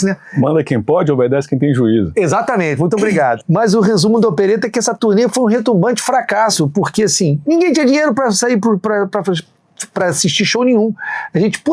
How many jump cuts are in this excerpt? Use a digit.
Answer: 1